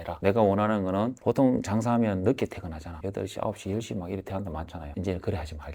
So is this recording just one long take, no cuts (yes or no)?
yes